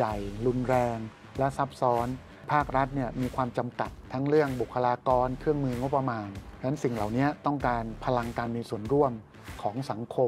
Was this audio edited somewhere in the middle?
no; 0 cuts

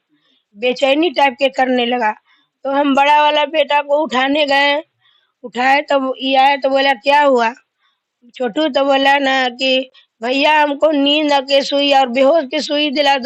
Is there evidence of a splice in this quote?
no; 0 cuts

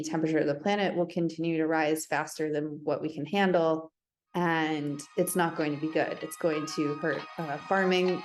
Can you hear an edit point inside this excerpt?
no; 0 cuts

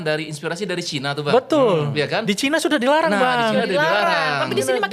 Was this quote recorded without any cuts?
yes; 0 cuts

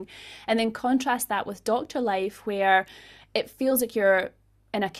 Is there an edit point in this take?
no; 0 cuts

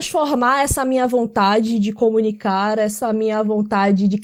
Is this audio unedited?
yes; 0 cuts

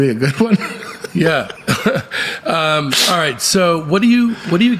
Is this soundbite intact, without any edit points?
yes; 0 cuts

